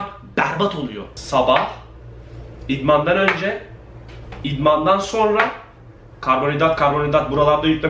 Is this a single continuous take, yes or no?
no